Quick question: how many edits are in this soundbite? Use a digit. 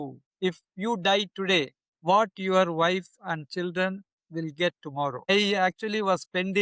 1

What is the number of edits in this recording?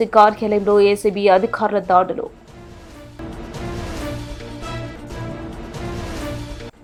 0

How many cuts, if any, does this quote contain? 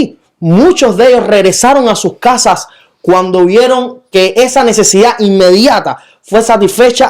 0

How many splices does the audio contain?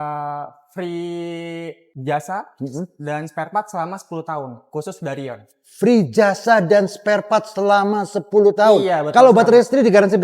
1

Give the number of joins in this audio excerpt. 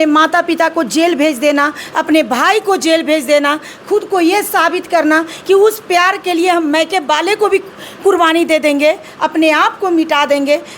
0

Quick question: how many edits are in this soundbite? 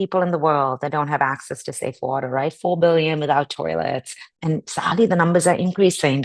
1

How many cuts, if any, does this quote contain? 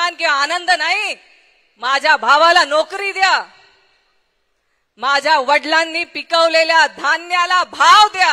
0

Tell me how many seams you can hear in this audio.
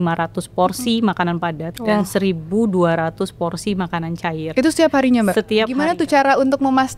2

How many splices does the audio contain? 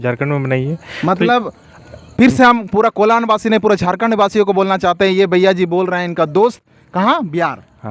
0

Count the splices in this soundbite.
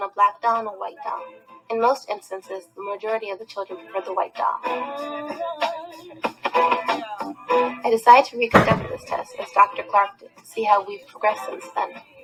0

